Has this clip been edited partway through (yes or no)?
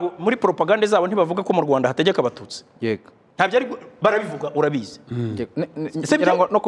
no